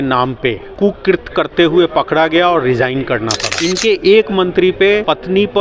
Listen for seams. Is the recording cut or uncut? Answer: cut